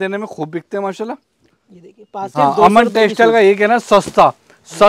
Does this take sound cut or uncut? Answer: cut